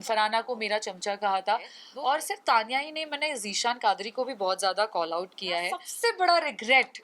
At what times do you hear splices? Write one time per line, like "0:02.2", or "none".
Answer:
0:01.8
0:05.8